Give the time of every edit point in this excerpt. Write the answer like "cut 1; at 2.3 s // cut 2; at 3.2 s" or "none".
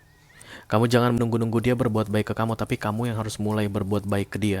cut 1; at 1.2 s